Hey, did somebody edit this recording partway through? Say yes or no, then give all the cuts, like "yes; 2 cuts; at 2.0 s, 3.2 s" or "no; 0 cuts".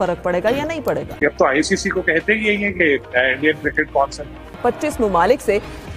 yes; 2 cuts; at 1.1 s, 4.5 s